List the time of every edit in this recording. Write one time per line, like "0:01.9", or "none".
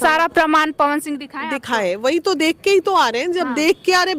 none